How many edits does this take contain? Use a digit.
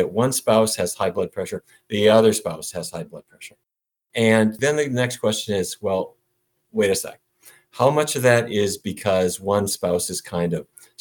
2